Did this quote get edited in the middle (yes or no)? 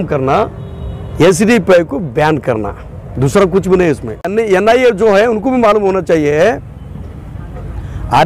yes